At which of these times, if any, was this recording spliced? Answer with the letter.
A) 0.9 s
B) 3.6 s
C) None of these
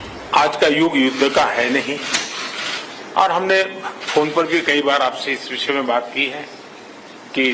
A